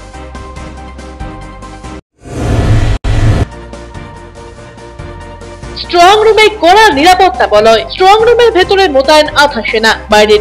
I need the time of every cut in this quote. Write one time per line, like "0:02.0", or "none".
none